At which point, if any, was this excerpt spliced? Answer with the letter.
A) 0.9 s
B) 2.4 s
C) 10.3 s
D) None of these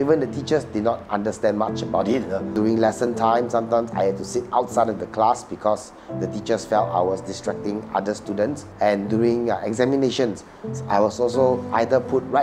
B